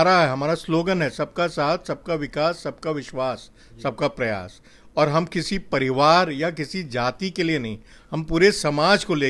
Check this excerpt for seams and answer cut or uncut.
uncut